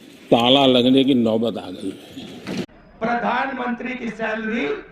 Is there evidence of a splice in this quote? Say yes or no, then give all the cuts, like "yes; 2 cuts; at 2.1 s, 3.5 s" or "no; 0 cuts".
yes; 1 cut; at 2.6 s